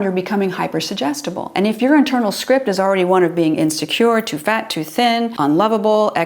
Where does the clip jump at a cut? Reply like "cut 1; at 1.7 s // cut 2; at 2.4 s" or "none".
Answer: cut 1; at 5.3 s